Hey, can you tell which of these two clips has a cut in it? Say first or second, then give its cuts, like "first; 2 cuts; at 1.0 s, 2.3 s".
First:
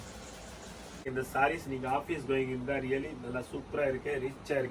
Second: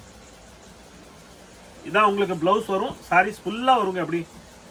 first; 1 cut; at 1.1 s